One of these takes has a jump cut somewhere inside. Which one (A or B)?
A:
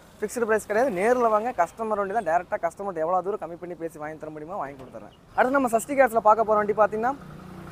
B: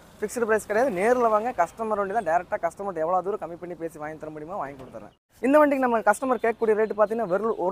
B